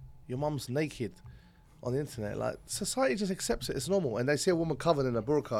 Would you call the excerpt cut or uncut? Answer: uncut